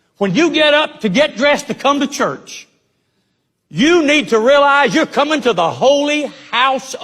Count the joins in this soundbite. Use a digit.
0